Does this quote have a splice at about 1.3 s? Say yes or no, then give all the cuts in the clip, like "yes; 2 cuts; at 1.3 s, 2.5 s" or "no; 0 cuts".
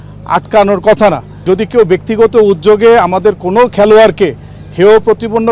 yes; 1 cut; at 1.3 s